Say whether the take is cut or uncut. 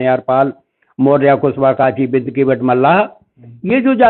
uncut